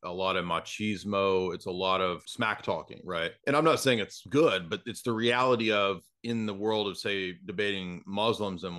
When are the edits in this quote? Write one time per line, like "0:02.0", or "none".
0:02.3
0:03.4
0:04.2

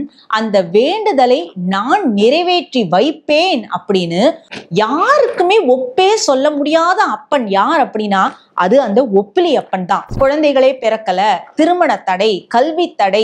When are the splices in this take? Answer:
0:04.5
0:10.1

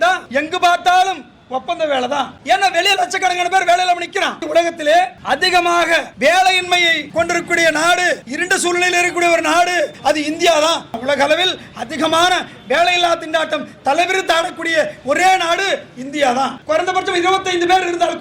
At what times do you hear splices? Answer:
0:02.4
0:04.4
0:09.9
0:11.0
0:16.6

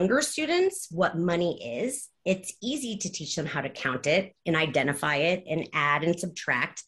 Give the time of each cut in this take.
none

